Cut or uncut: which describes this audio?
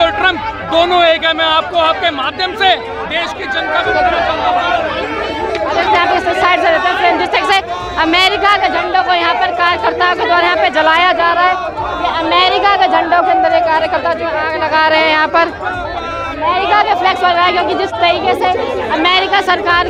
uncut